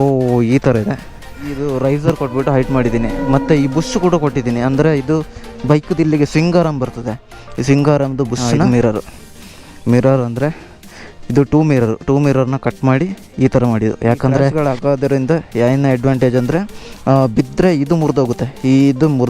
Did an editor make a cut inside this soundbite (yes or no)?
yes